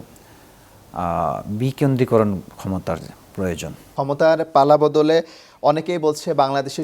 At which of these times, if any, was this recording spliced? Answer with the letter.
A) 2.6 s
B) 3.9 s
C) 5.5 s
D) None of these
B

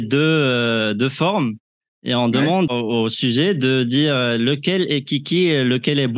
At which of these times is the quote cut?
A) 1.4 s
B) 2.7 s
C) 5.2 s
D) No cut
B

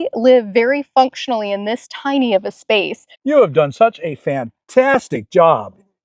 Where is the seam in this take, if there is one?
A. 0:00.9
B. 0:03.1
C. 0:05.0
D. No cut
B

